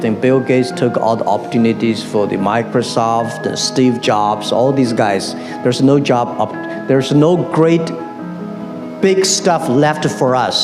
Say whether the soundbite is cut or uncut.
uncut